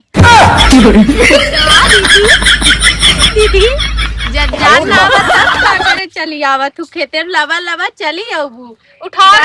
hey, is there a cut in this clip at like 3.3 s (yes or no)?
no